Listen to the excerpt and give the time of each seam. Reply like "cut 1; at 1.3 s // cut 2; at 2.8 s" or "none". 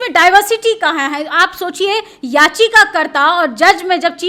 none